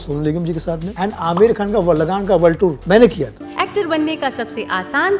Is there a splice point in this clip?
yes; 3 cuts; at 0.9 s, 2.8 s, 3.4 s

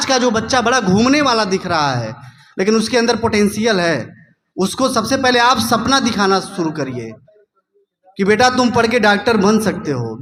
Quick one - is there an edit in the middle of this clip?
no; 0 cuts

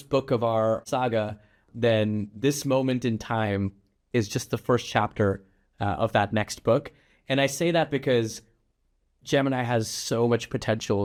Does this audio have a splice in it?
no; 0 cuts

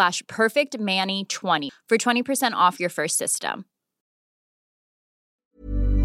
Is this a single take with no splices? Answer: no; 1 cut; at 1.7 s

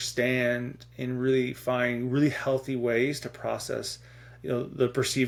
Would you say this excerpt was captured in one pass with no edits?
yes; 0 cuts

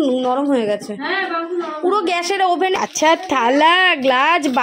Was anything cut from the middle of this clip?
yes; 1 cut; at 2.7 s

